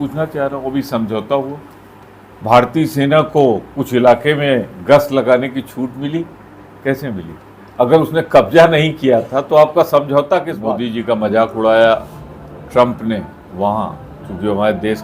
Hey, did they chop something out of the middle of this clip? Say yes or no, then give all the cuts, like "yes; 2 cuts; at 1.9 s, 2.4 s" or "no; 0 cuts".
yes; 1 cut; at 10.5 s